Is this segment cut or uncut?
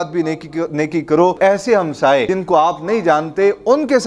cut